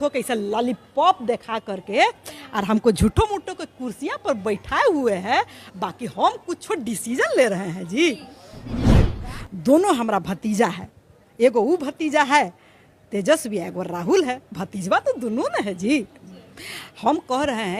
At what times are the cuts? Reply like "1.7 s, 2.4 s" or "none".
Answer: 9.1 s